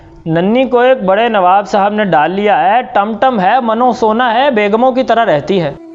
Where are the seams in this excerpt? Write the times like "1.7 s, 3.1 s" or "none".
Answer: none